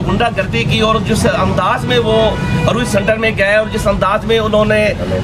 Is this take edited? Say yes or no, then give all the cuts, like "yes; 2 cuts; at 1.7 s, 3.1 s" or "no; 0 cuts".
no; 0 cuts